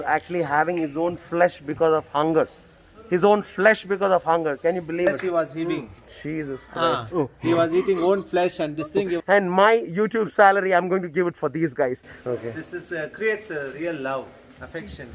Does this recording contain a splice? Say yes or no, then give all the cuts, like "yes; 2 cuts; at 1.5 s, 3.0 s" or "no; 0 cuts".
yes; 3 cuts; at 5.1 s, 9.2 s, 12.1 s